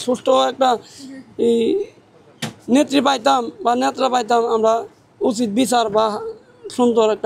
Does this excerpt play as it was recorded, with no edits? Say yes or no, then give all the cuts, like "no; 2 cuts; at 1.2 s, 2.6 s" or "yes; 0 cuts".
yes; 0 cuts